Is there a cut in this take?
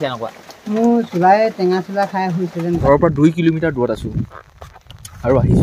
yes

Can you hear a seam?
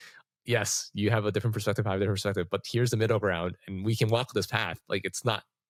no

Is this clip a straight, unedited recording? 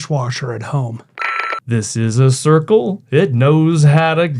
no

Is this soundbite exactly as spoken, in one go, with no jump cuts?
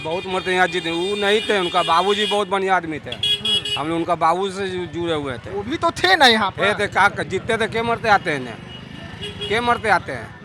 yes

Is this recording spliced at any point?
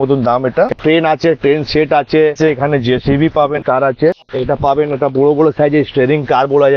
yes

